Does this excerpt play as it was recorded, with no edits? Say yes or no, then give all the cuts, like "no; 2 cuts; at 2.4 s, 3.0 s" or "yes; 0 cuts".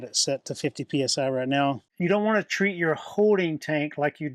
no; 1 cut; at 1.9 s